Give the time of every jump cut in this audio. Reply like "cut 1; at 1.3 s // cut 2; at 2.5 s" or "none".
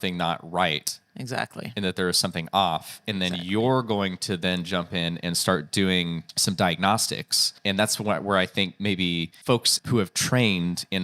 cut 1; at 6.3 s // cut 2; at 7.5 s // cut 3; at 9.7 s